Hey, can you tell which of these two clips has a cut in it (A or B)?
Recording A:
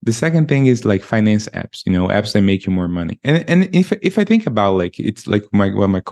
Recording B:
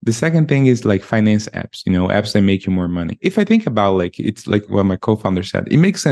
B